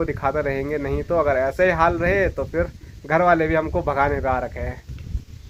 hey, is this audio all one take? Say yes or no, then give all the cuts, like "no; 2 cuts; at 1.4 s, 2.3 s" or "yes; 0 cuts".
yes; 0 cuts